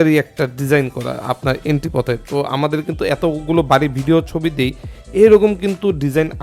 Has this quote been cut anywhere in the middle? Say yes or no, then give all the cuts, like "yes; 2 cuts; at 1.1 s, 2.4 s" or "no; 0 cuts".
no; 0 cuts